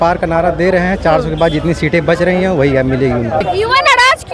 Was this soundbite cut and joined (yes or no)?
yes